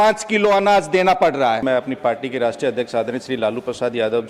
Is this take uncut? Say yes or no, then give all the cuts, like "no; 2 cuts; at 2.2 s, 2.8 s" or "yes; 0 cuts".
no; 1 cut; at 1.6 s